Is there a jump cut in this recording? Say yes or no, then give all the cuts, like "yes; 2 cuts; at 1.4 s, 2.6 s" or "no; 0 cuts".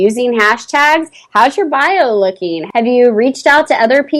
yes; 1 cut; at 2.6 s